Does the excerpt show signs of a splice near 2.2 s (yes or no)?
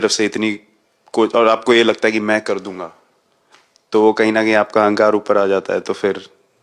no